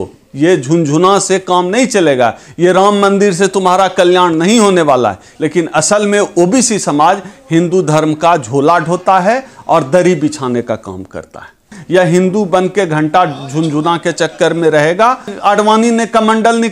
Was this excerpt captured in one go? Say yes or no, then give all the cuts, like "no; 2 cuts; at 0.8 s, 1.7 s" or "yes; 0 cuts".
no; 3 cuts; at 5.3 s, 11.7 s, 15.3 s